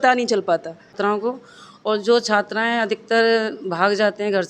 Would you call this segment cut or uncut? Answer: cut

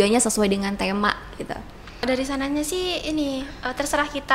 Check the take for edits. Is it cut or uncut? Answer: cut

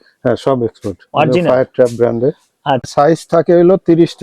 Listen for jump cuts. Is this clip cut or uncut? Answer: cut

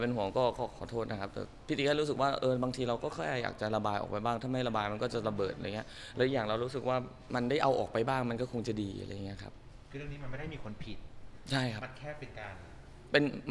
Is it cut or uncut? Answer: cut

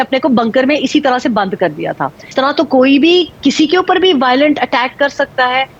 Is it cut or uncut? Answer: cut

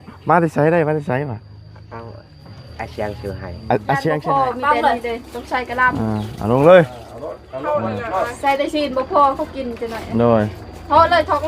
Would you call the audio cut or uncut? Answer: cut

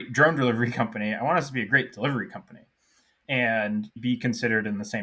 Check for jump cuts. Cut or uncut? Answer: cut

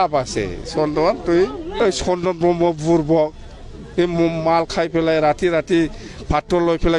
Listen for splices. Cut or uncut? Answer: cut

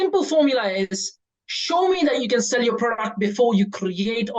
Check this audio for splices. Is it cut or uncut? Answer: uncut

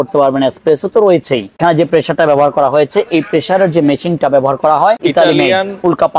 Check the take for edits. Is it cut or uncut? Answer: cut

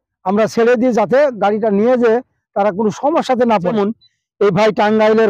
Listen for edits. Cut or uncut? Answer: cut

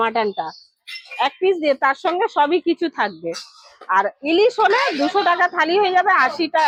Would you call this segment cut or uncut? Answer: uncut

